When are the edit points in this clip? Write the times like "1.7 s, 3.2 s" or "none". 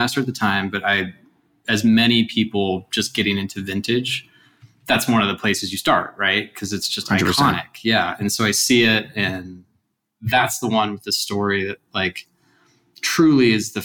10.1 s

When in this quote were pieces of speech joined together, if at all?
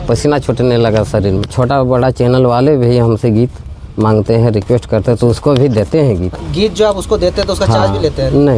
1.4 s, 6.3 s

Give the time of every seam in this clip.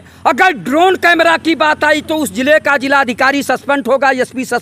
none

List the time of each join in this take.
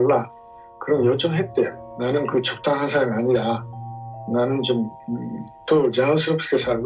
1.9 s

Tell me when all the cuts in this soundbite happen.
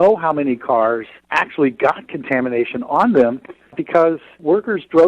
1.2 s

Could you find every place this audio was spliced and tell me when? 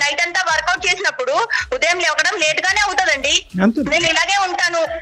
none

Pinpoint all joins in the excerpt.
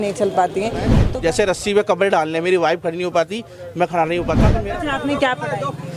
1.0 s, 4.5 s

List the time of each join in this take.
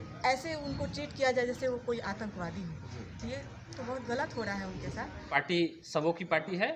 5.3 s

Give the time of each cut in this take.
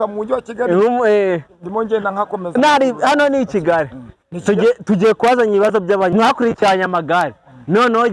6.1 s

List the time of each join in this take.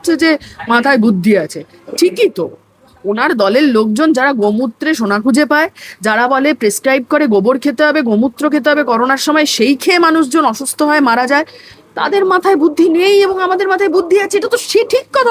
none

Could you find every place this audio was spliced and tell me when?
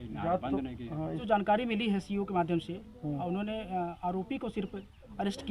1.2 s

